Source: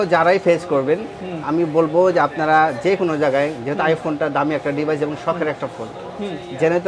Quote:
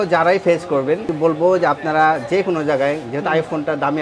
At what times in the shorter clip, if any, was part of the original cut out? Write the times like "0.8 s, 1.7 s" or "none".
1.1 s